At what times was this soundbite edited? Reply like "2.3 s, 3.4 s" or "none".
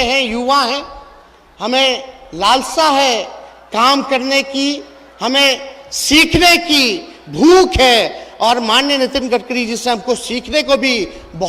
none